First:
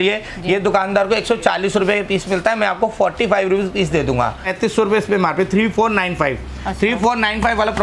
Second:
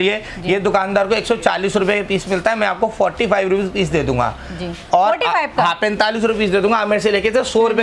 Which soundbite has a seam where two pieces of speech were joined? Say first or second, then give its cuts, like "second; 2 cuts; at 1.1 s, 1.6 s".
first; 1 cut; at 4.5 s